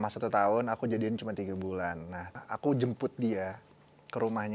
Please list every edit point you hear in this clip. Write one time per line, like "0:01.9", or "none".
0:02.4